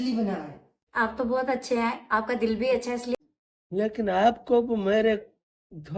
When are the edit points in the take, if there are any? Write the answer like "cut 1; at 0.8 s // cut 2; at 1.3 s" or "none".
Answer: cut 1; at 3.1 s